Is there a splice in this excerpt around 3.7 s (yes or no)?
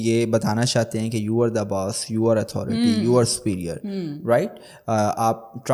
no